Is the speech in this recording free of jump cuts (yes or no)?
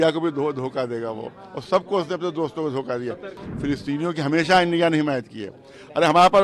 no